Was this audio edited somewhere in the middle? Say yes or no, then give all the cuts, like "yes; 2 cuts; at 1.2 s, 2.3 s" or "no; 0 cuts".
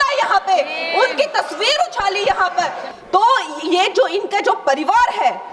yes; 1 cut; at 2.8 s